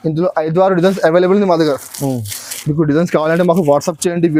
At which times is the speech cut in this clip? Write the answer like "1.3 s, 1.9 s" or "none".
none